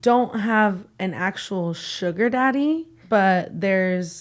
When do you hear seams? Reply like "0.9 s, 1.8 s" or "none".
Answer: 2.9 s

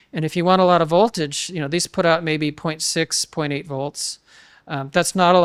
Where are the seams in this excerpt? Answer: none

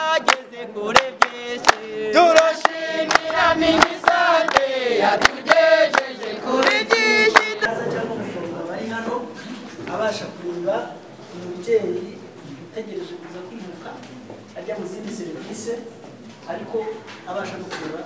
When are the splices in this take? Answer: 7.7 s

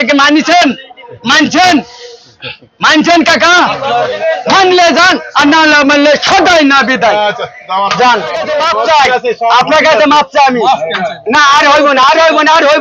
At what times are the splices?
8.5 s

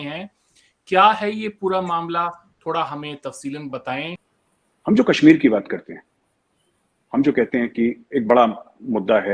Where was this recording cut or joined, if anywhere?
4.1 s

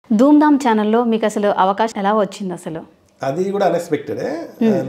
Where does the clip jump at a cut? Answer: 1.9 s

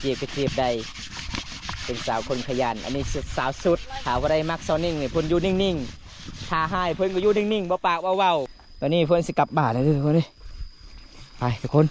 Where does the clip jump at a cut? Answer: 3.9 s, 8.6 s

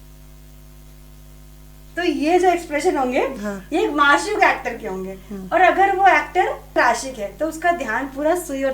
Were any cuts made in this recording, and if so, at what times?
6.8 s

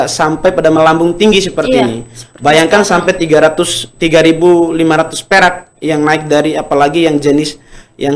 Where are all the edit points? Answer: none

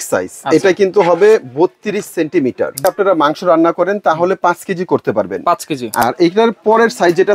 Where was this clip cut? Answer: 2.8 s, 6.0 s

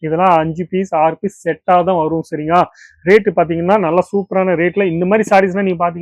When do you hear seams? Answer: none

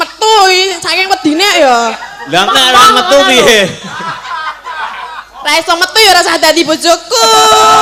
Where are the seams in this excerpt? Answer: none

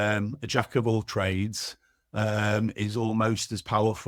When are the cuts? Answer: none

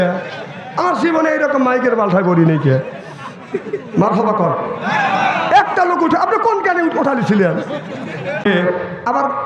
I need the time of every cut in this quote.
8.5 s

